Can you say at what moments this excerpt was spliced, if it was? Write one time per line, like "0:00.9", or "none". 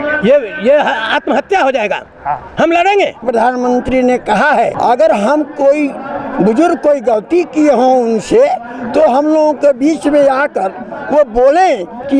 0:03.2
0:04.7